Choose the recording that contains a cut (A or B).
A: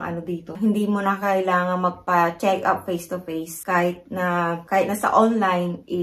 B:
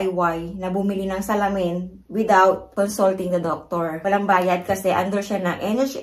B